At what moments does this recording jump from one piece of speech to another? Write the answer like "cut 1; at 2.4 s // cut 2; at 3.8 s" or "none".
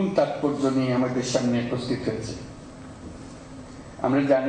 none